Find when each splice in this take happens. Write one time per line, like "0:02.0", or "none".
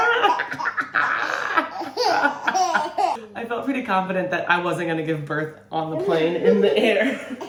none